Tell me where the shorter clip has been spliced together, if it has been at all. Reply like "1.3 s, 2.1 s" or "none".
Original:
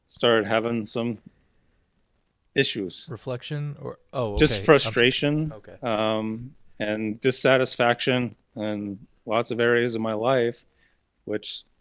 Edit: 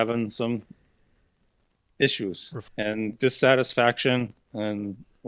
2.5 s